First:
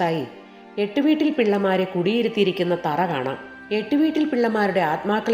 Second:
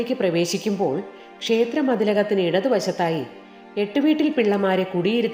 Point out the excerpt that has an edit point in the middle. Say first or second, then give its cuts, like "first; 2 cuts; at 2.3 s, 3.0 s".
first; 1 cut; at 3.5 s